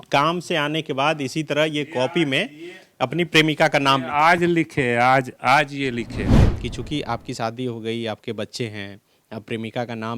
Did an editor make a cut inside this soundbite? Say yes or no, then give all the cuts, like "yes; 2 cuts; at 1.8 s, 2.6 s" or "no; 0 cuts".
yes; 1 cut; at 6.4 s